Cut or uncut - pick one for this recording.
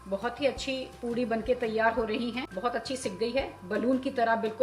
cut